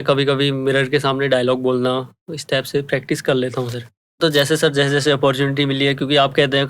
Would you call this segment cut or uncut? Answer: cut